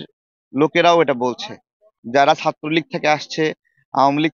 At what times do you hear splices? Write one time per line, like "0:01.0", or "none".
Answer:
0:01.9

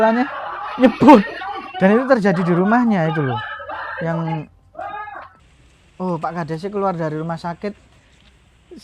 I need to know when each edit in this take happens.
0:05.4

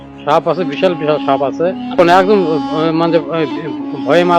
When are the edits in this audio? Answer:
none

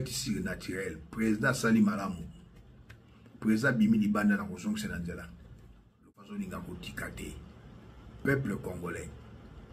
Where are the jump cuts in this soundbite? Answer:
0:06.1

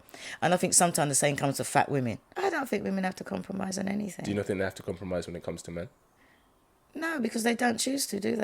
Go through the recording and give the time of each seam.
0:02.2

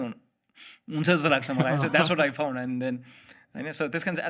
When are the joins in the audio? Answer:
none

